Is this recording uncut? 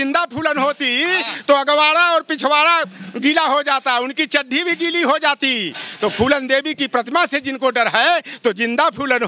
yes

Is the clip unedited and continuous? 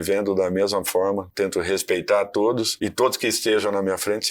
no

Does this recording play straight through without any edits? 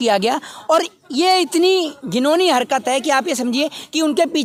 yes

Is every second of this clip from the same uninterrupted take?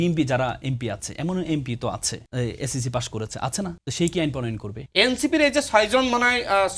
no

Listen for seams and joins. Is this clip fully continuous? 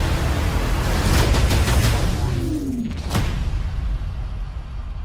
yes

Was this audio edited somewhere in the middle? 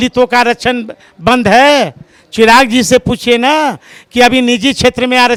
no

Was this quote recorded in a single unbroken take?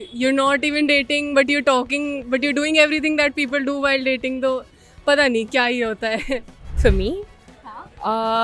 no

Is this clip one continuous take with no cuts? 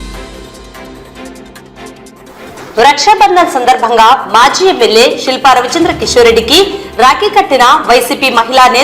no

